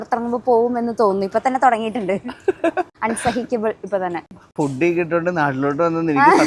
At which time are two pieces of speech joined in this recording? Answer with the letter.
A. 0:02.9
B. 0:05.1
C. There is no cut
A